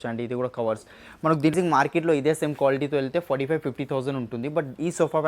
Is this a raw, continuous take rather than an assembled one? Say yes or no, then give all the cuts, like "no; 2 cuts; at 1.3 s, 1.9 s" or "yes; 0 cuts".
no; 1 cut; at 1.5 s